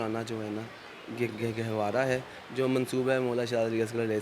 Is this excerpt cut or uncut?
uncut